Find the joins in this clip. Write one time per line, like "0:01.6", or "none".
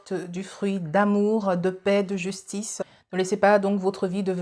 0:02.8